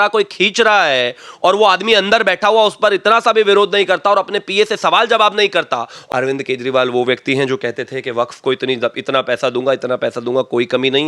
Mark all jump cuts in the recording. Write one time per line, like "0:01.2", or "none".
0:05.9